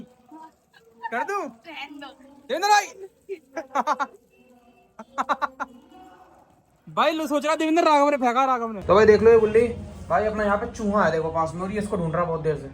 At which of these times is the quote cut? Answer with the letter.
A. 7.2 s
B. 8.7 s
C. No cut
B